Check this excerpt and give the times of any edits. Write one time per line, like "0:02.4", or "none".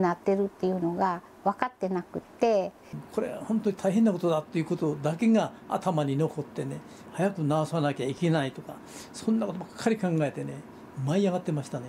0:03.0
0:07.1

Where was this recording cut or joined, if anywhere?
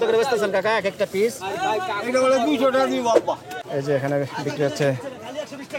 0:03.5

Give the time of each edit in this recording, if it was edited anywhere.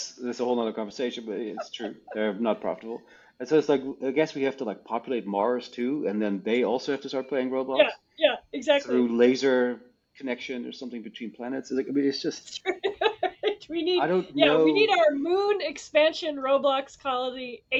none

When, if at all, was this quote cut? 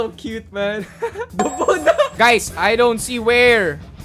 0:02.1

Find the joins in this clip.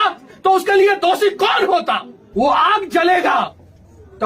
0:02.1

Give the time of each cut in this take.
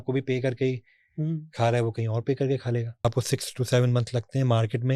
0:03.0

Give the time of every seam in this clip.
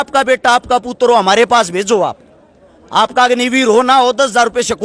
none

